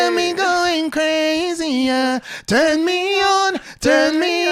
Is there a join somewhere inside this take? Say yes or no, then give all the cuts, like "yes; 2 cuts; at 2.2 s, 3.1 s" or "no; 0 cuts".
no; 0 cuts